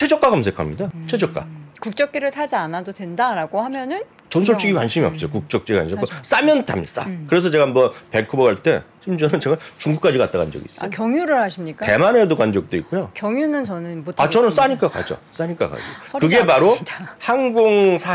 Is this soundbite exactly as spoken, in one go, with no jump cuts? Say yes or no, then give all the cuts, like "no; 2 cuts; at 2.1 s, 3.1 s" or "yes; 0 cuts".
no; 1 cut; at 1.0 s